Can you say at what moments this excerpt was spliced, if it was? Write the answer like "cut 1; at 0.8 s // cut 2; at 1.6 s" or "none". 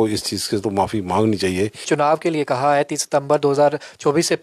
cut 1; at 1.9 s